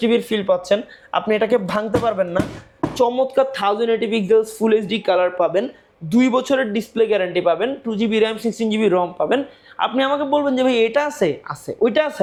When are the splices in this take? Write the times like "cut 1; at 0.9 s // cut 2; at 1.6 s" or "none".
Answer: none